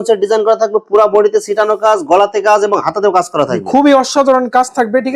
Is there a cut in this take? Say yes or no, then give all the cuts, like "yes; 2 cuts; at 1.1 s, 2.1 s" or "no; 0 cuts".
no; 0 cuts